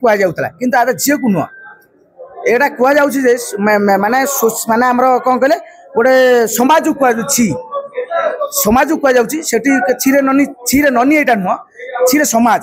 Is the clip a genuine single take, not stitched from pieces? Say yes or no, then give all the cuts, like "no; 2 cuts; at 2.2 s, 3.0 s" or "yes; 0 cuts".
yes; 0 cuts